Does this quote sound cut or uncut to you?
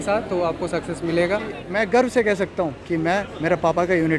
cut